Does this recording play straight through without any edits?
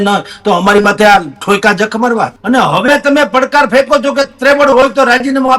no; 1 cut; at 2.4 s

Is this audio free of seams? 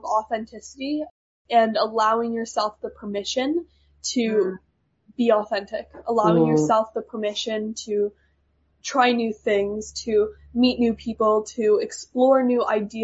yes; 0 cuts

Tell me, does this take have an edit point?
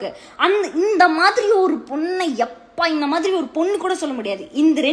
no; 0 cuts

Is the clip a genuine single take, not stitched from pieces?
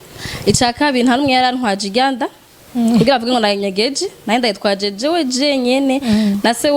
yes; 0 cuts

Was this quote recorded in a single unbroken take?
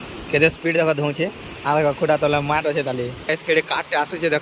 no; 1 cut; at 3.5 s

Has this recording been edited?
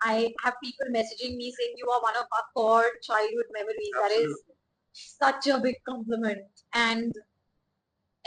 no; 0 cuts

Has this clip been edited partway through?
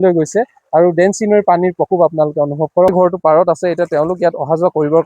yes; 1 cut; at 2.9 s

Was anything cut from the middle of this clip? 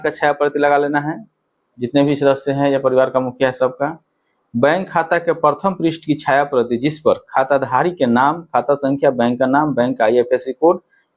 no; 0 cuts

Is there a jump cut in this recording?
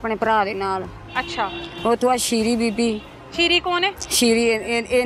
no; 0 cuts

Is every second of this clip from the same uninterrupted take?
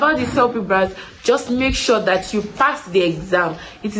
yes; 0 cuts

